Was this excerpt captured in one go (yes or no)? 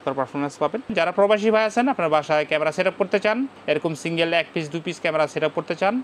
no